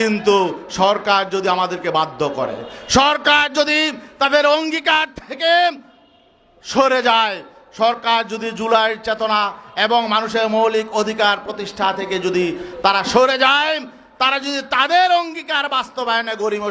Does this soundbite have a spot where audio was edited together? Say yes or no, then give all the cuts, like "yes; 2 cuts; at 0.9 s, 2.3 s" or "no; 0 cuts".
no; 0 cuts